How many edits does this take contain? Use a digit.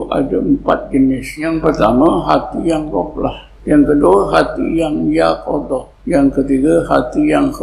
3